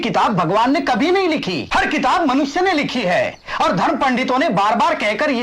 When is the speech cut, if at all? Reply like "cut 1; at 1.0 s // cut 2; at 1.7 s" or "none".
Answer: cut 1; at 1.6 s